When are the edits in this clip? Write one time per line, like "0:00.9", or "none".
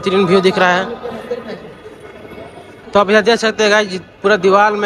0:02.9